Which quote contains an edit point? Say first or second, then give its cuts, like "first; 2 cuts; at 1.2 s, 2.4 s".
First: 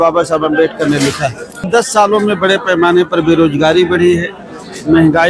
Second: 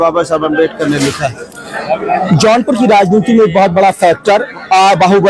first; 1 cut; at 1.7 s